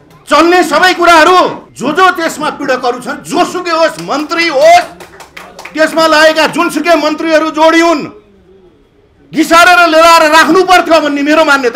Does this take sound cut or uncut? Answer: cut